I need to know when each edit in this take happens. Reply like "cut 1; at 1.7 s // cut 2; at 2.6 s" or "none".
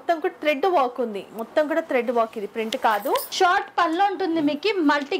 cut 1; at 3.3 s